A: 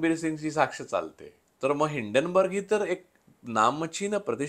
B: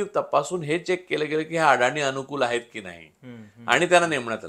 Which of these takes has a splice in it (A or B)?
A